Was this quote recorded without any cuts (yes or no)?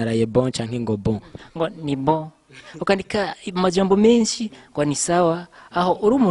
yes